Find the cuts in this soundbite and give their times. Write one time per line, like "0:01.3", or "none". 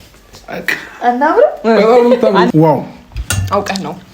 0:02.5